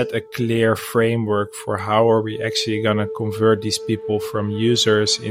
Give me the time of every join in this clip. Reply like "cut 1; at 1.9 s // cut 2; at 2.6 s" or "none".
none